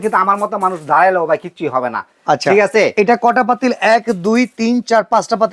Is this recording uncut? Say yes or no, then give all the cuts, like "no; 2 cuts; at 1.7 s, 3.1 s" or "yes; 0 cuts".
yes; 0 cuts